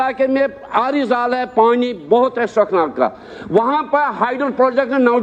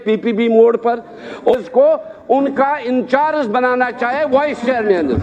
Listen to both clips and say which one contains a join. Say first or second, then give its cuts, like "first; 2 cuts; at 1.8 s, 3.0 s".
second; 1 cut; at 1.6 s